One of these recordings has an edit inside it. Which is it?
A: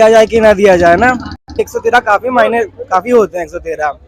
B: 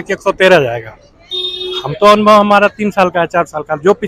A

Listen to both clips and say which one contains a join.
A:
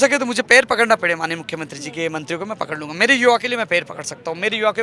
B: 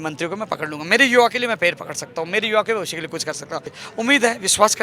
B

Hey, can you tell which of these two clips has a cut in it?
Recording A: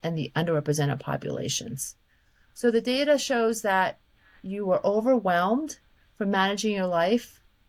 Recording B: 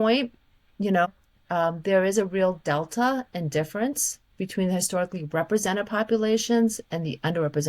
B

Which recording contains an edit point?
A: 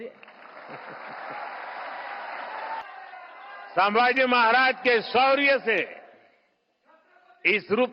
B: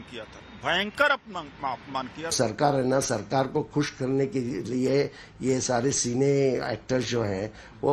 A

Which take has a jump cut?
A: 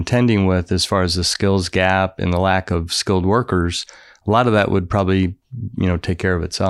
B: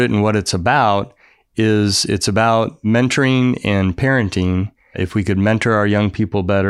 B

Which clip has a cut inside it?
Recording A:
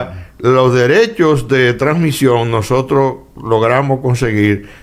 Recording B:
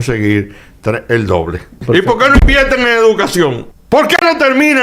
B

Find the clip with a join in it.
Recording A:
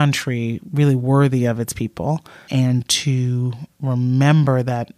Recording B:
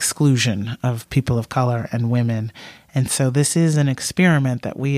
A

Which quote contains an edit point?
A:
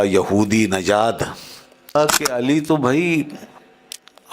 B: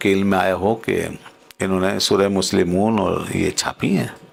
A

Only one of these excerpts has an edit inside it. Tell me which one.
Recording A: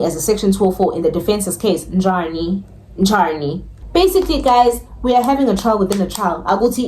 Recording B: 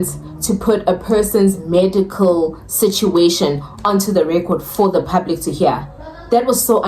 A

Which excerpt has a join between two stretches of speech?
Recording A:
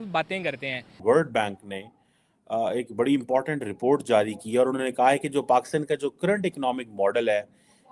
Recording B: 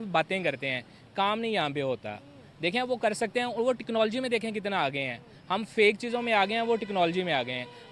A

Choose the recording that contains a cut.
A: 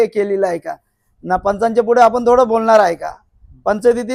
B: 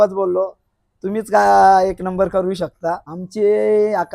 B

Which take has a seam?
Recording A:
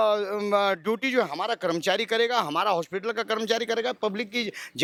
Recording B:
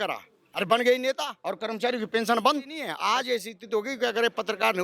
B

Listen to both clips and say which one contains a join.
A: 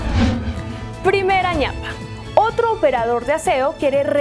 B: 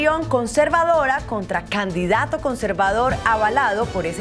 A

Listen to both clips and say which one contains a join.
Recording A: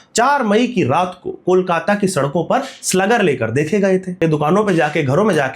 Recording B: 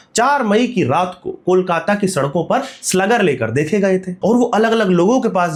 A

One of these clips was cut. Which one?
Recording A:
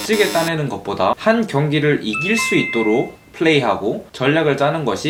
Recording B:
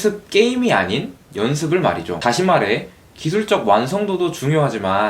B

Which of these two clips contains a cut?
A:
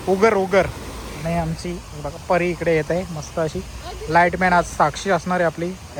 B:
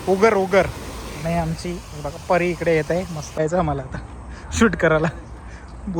B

